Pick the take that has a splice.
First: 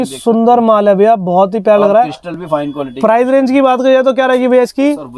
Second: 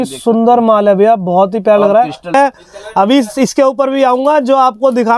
second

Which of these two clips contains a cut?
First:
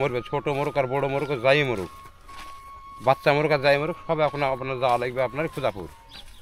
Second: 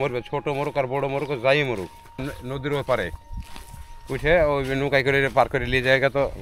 second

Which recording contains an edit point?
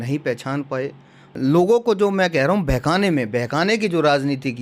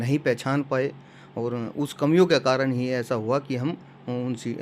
first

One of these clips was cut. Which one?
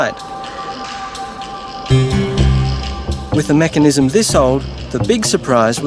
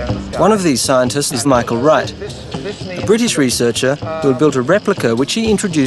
second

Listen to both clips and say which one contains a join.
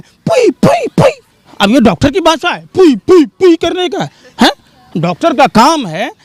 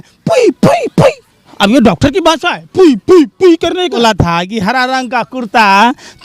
second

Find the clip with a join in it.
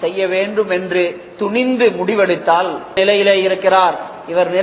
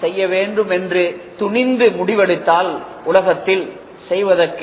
first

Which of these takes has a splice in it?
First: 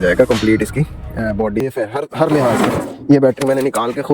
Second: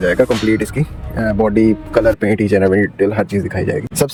first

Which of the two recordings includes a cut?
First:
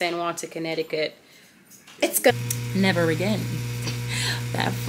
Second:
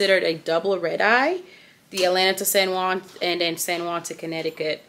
first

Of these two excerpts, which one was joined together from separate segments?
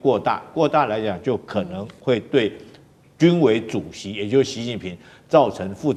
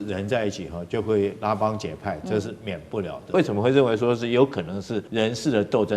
second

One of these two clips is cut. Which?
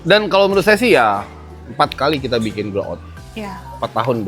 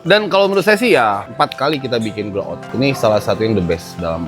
second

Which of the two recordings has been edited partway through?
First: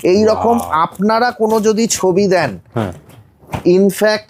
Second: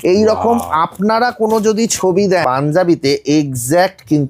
second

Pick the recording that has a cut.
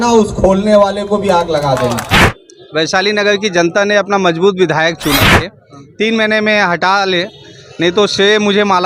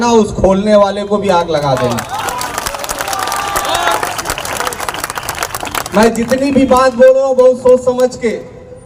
first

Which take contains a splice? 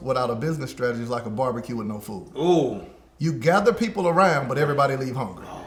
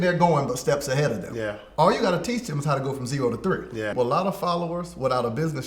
second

